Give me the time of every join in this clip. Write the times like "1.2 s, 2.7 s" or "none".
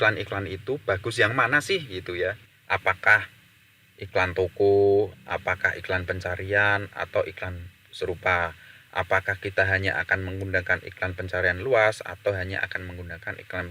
2.5 s